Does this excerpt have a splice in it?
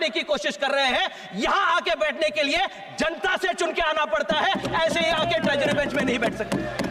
no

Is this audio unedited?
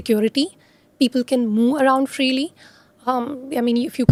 yes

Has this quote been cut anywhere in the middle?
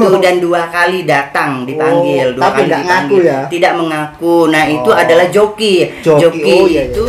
no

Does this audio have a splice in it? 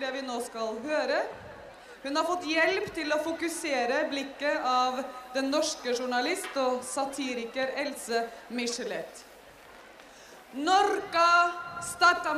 no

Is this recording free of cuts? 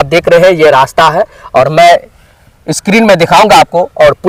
yes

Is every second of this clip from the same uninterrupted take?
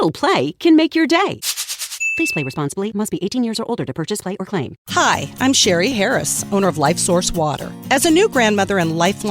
no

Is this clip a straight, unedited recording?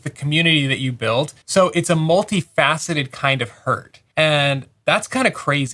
no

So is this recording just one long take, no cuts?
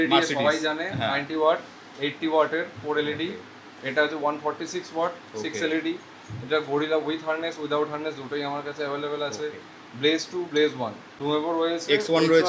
no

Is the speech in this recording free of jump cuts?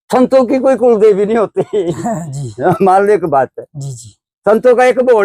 yes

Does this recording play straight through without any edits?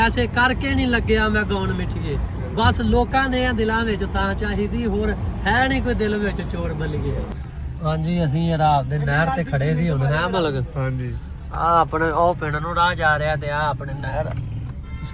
no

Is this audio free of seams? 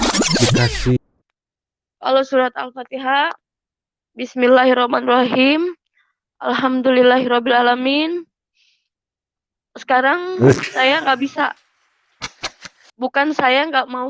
no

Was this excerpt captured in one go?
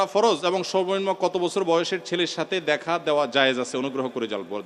yes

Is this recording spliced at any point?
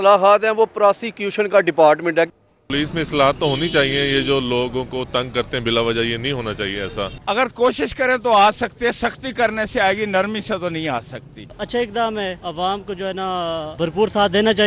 yes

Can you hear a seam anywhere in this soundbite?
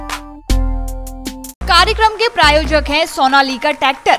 yes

